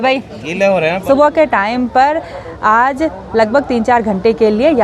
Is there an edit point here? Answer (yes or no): yes